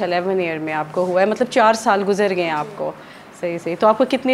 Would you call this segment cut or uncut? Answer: uncut